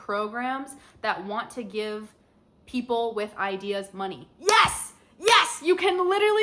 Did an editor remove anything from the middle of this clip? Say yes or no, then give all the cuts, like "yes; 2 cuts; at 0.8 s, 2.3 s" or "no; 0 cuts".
no; 0 cuts